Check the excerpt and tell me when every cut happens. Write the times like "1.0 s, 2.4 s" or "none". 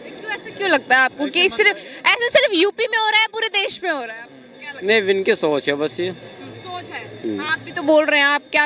none